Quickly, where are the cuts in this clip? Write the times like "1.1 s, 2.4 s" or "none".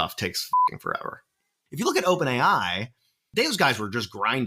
1.5 s